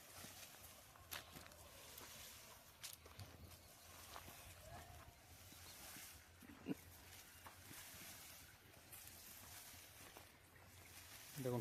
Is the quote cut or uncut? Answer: uncut